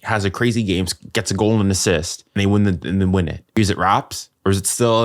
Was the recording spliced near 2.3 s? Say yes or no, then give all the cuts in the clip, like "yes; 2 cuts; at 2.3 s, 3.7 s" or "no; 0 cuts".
yes; 2 cuts; at 2.3 s, 3.5 s